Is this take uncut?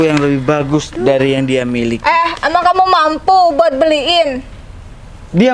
yes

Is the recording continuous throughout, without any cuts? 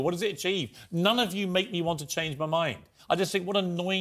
yes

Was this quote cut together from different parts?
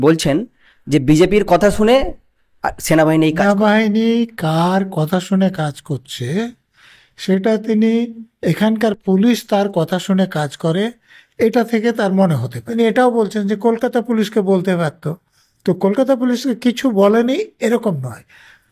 yes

